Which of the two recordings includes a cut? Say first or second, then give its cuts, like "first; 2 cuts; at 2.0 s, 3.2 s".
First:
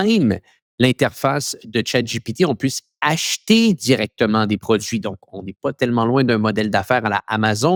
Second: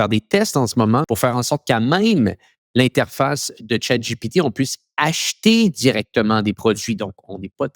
second; 1 cut; at 1.1 s